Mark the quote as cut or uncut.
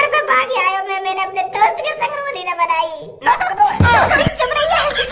cut